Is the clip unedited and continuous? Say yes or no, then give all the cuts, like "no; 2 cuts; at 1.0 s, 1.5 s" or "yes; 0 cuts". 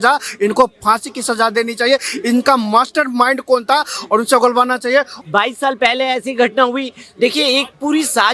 no; 1 cut; at 5.1 s